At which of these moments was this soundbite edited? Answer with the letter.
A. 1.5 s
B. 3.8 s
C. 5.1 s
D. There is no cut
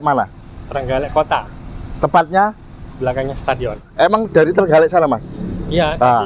B